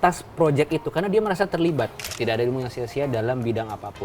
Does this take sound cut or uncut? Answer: cut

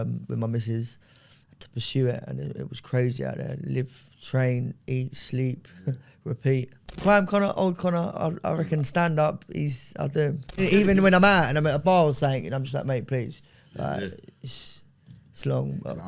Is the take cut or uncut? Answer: cut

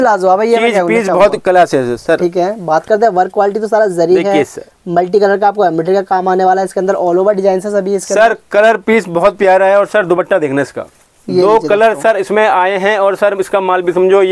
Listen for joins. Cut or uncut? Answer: uncut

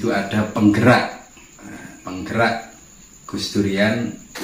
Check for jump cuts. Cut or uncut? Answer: uncut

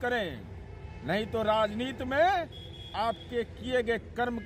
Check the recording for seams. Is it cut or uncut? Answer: uncut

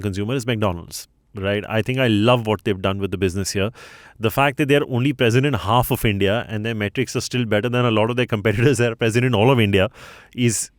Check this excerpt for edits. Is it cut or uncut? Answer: uncut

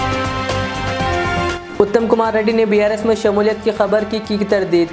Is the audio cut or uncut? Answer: uncut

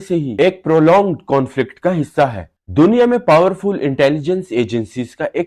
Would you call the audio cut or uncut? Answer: cut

